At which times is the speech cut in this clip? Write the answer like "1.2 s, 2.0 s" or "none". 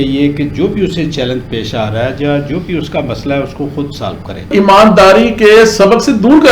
4.5 s